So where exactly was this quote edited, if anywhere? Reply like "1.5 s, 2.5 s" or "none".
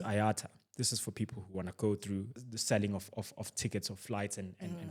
2.3 s